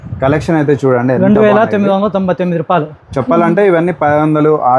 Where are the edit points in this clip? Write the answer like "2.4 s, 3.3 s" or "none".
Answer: 3.0 s